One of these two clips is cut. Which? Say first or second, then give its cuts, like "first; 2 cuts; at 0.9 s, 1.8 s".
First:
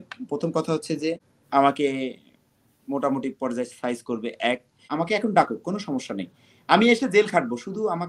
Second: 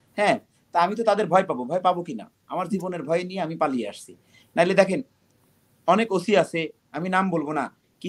first; 2 cuts; at 1.3 s, 4.9 s